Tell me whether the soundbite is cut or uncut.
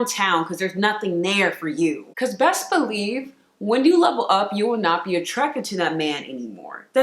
cut